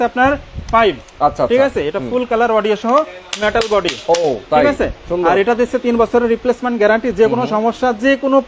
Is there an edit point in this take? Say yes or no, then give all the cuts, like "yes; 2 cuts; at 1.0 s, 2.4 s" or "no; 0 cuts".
no; 0 cuts